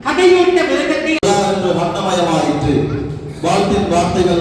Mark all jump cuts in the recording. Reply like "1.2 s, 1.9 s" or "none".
1.2 s